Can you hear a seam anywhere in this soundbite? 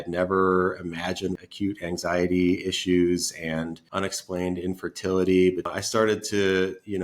yes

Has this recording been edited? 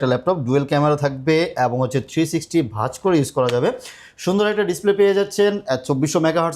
no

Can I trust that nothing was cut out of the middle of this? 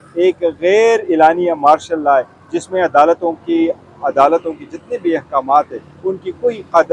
yes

